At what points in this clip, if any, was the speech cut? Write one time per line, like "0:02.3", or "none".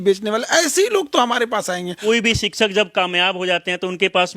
0:01.9